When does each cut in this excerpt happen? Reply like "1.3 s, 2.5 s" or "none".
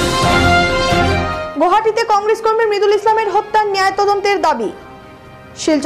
0.9 s